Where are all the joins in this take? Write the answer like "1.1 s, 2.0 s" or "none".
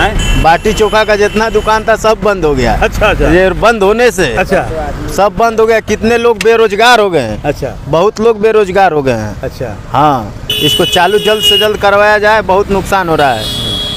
none